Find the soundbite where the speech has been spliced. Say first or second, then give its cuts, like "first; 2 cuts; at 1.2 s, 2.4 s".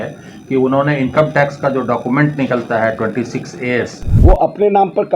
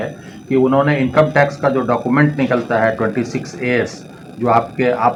first; 1 cut; at 4.0 s